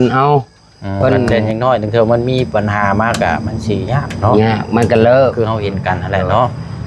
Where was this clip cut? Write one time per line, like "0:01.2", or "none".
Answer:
0:01.3